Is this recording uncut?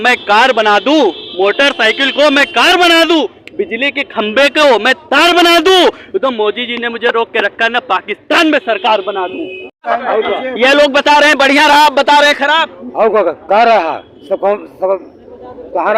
no; 1 cut; at 9.8 s

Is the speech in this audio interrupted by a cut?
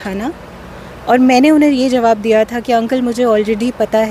no; 0 cuts

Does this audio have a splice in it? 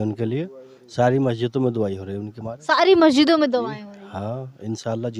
no; 0 cuts

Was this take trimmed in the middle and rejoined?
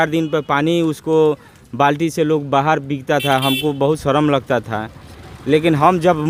no; 0 cuts

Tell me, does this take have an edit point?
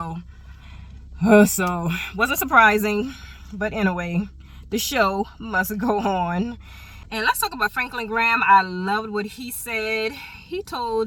no; 0 cuts

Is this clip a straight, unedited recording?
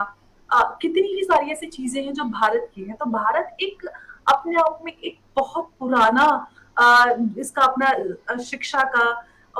yes; 0 cuts

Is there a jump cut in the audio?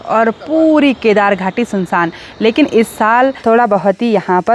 yes; 1 cut; at 3.4 s

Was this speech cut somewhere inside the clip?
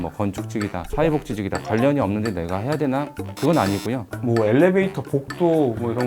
yes; 1 cut; at 4.1 s

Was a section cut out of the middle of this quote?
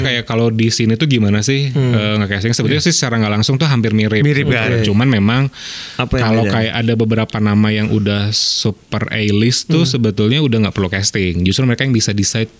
no; 0 cuts

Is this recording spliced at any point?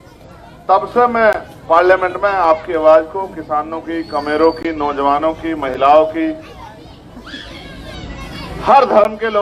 no; 0 cuts

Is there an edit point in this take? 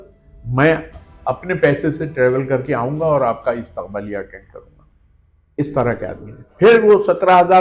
no; 0 cuts

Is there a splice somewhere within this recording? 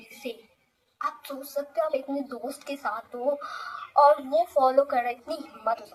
no; 0 cuts

